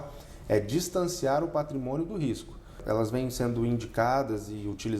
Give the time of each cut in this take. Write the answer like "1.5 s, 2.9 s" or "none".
2.8 s

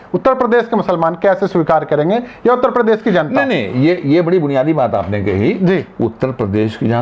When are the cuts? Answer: none

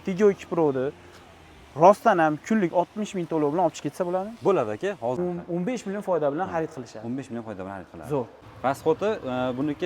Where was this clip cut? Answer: 5.2 s, 8.3 s

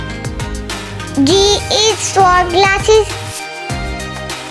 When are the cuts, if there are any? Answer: 1.2 s

